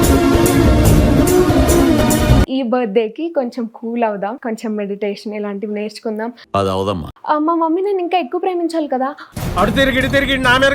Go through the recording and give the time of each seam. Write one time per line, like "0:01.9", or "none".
0:02.5
0:07.1